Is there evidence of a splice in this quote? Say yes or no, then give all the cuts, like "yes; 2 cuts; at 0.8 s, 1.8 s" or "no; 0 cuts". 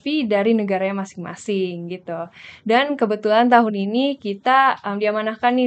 no; 0 cuts